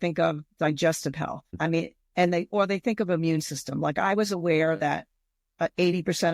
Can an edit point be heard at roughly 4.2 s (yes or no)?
no